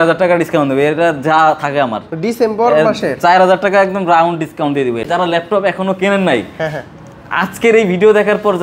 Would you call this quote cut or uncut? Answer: cut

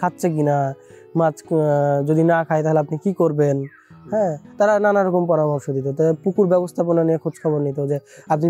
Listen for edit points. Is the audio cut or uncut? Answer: uncut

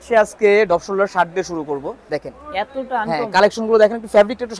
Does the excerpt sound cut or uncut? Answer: cut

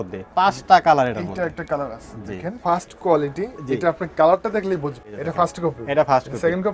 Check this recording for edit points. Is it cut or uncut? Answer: cut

